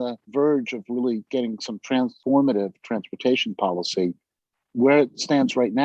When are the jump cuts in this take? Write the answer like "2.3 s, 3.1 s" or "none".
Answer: none